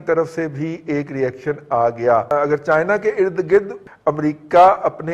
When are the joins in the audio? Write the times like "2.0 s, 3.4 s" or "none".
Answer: 2.3 s, 3.8 s